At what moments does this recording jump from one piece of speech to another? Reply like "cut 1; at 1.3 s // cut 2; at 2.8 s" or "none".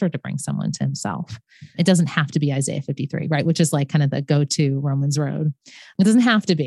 cut 1; at 1.8 s // cut 2; at 5.9 s